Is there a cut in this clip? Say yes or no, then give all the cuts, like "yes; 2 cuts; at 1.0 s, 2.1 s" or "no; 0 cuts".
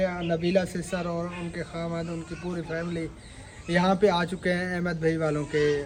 no; 0 cuts